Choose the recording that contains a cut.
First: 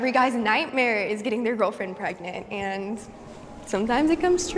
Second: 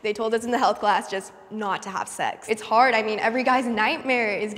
second; 1 cut; at 2.4 s

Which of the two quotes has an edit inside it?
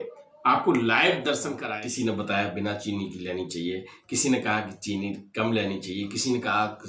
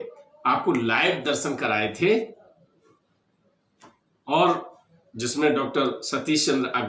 first; 1 cut; at 1.6 s

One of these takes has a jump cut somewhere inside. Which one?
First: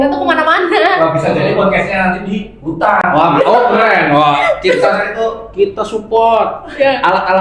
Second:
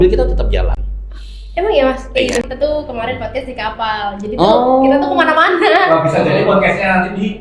second; 1 cut; at 2.5 s

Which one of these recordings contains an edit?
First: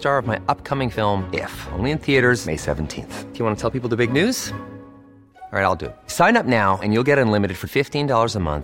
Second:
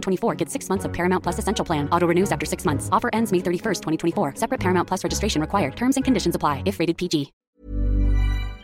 second; 1 cut; at 7.4 s

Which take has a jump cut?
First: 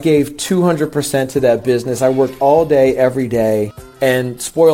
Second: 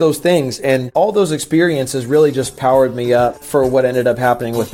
first; 1 cut; at 3.8 s

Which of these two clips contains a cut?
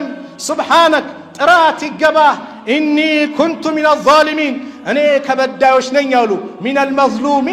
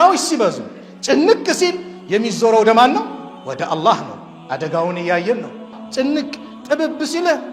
second; 1 cut; at 5.8 s

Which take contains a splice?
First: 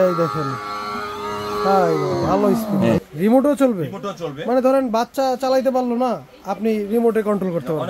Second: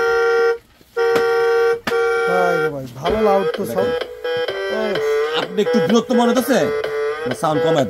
first; 1 cut; at 3.1 s

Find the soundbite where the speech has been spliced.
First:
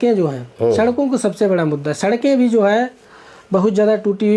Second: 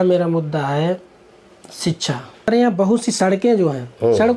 second; 1 cut; at 2.5 s

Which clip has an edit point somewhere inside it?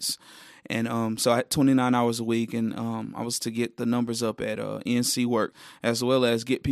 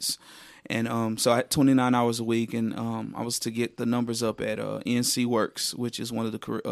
first; 1 cut; at 5.6 s

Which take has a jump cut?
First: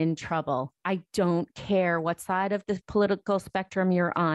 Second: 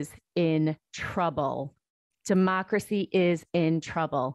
first; 1 cut; at 2.8 s

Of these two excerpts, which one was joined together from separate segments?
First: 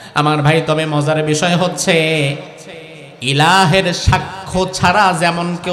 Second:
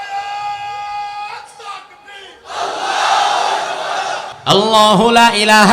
second; 1 cut; at 4.3 s

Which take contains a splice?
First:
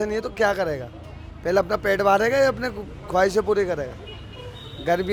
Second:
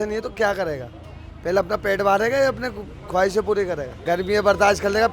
second; 1 cut; at 3.9 s

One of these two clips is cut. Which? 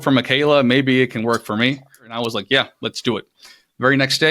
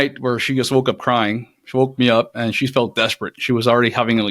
first; 1 cut; at 2.2 s

